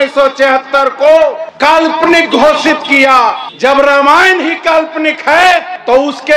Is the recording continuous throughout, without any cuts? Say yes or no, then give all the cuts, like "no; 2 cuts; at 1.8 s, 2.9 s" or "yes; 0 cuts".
yes; 0 cuts